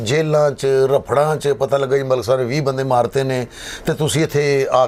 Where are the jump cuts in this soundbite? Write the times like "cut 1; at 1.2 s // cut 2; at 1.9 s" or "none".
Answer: none